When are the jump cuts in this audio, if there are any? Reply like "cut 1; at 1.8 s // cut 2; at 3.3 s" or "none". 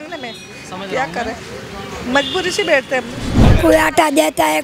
cut 1; at 3.5 s